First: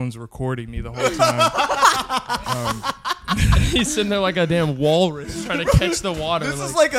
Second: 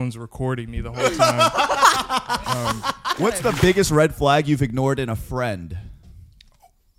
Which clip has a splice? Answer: second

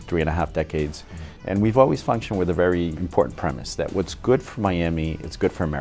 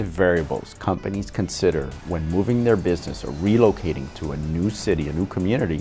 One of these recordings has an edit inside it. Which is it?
first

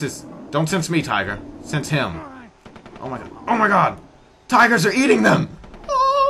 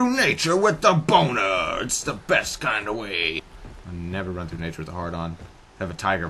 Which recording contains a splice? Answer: second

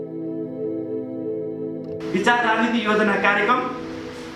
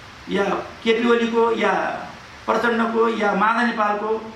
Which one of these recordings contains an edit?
first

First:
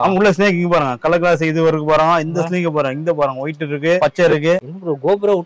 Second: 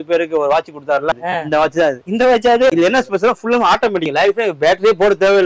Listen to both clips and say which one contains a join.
second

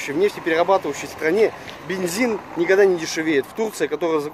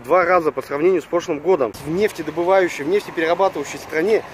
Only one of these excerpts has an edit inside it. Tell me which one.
second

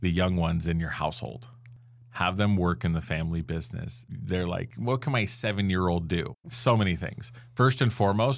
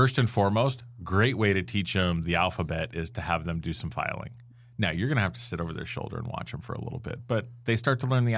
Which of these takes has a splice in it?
first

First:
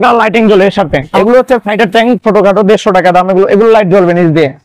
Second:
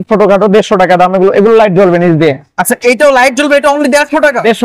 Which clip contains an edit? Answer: first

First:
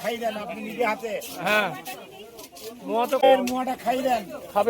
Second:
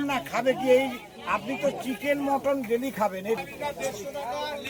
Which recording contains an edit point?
first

